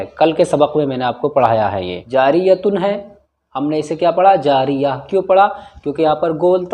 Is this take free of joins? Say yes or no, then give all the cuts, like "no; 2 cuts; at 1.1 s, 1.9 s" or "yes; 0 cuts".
no; 1 cut; at 1.9 s